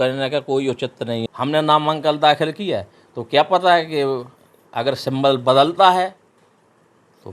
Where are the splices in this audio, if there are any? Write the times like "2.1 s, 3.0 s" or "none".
1.2 s